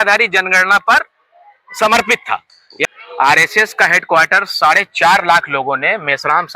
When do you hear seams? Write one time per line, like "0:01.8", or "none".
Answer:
0:02.7